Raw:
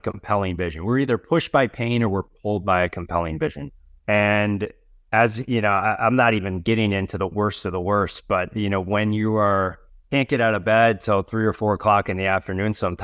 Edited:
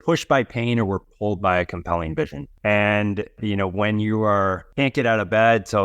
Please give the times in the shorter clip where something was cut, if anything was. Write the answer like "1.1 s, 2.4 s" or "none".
2.5 s, 3.4 s, 4.6 s